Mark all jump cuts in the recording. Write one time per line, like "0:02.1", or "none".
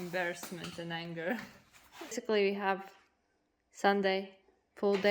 0:02.2